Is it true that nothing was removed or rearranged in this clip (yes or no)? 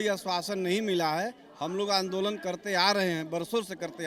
yes